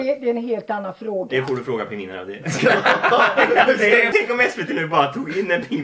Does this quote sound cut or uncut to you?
cut